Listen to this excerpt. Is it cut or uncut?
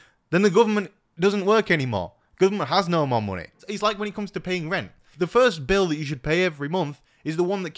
cut